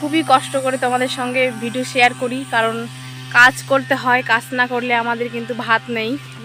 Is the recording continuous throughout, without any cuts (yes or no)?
yes